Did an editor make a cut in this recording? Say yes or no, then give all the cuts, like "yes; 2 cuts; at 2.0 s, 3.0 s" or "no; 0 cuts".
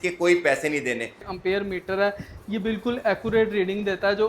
yes; 1 cut; at 1.3 s